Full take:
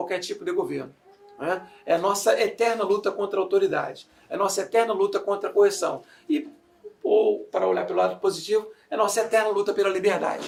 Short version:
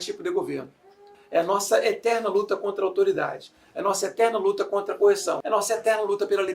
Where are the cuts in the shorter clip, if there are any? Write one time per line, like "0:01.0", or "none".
0:01.1
0:05.4